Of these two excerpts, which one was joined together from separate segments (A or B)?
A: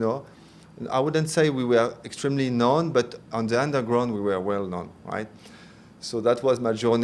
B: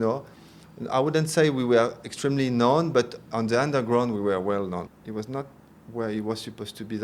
B